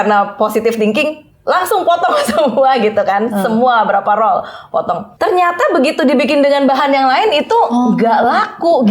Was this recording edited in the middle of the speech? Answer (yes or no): yes